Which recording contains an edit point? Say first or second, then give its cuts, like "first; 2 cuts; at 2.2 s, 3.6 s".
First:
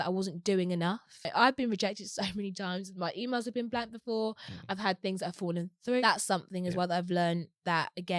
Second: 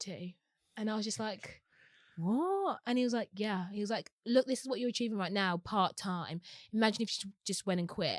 first; 2 cuts; at 1.3 s, 6.0 s